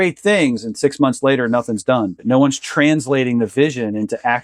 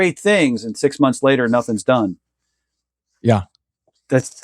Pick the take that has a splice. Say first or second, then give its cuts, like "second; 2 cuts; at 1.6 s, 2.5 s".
first; 1 cut; at 2.2 s